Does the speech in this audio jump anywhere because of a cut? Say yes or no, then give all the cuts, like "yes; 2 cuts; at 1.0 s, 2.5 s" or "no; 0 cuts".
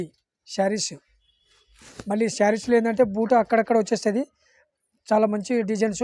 no; 0 cuts